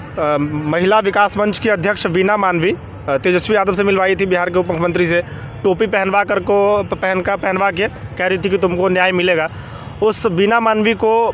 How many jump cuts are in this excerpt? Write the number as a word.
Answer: zero